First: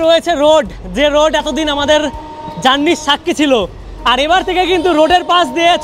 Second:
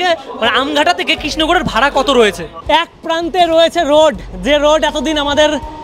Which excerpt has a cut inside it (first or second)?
second